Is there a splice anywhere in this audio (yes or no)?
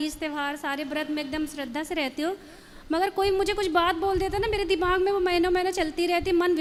no